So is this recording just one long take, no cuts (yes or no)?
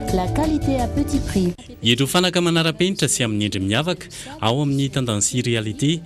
yes